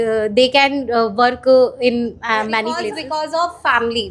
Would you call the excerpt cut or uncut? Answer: cut